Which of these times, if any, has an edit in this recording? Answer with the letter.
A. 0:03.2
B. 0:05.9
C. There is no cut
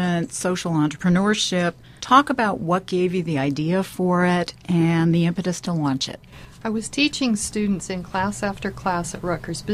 A